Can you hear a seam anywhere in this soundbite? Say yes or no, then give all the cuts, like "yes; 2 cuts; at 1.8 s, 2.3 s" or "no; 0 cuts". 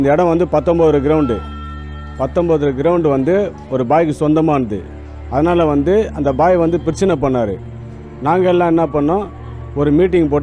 no; 0 cuts